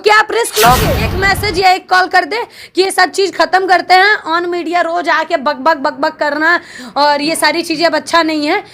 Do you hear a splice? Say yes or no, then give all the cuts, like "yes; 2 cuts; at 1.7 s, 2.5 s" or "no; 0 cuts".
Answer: yes; 1 cut; at 1.2 s